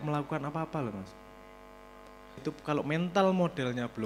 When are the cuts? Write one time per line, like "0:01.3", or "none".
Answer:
0:02.4